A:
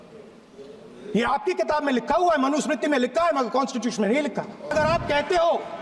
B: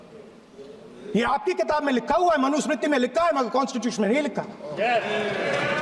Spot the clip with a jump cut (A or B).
A